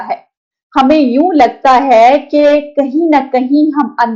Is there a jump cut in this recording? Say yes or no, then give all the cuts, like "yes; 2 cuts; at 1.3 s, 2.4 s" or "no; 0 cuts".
no; 0 cuts